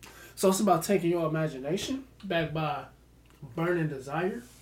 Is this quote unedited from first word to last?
no; 1 cut; at 2.1 s

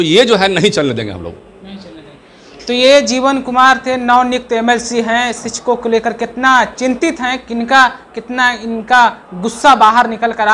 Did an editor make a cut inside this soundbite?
no; 0 cuts

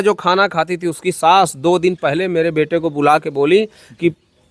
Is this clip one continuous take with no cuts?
yes; 0 cuts

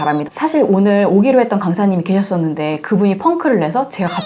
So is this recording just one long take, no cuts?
yes; 0 cuts

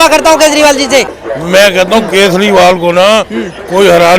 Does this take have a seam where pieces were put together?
yes; 1 cut; at 1.7 s

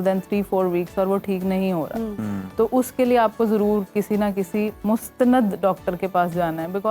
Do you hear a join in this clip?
no; 0 cuts

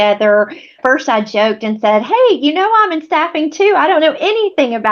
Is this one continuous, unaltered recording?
yes; 0 cuts

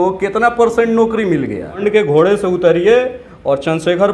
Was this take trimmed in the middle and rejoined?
yes; 1 cut; at 1.8 s

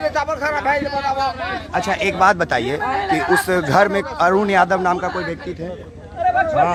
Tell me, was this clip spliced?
no; 0 cuts

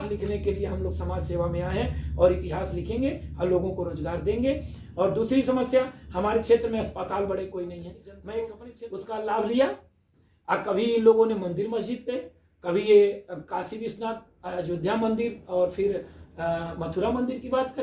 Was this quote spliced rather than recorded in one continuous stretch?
yes; 1 cut; at 8.6 s

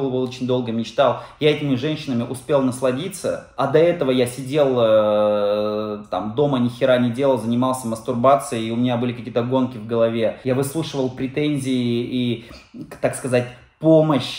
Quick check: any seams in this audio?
yes; 2 cuts; at 3.5 s, 10.4 s

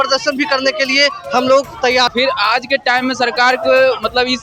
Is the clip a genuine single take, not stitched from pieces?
no; 1 cut; at 2.1 s

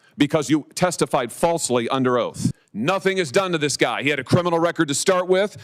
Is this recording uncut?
no; 1 cut; at 2.7 s

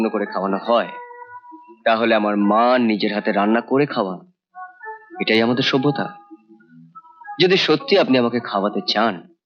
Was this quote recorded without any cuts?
yes; 0 cuts

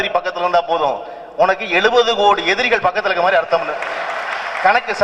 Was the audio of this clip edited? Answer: no; 0 cuts

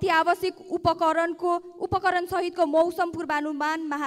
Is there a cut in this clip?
no; 0 cuts

